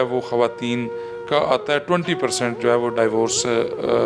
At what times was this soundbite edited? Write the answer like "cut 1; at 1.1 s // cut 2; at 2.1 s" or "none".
none